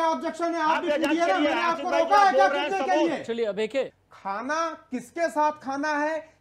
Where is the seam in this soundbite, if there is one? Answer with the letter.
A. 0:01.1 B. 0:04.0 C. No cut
B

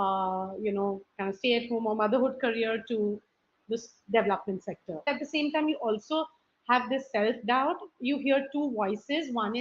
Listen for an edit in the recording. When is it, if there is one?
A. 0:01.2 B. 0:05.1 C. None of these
B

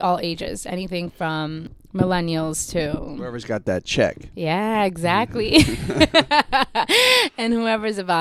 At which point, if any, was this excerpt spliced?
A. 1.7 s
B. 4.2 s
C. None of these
A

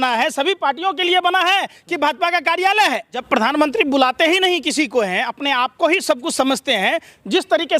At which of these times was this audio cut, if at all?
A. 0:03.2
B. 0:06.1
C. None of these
A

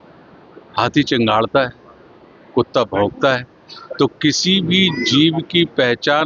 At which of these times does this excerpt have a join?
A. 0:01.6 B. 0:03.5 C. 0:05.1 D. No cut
D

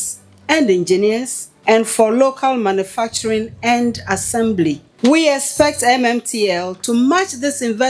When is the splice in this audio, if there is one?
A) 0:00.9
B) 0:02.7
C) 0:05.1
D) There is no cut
D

